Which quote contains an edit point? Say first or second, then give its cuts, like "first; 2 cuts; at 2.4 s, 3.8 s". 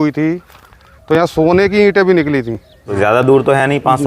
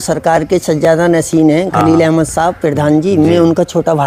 first; 1 cut; at 2.9 s